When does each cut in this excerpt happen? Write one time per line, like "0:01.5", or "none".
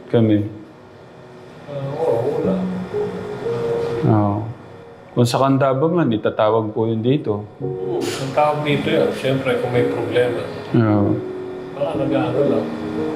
none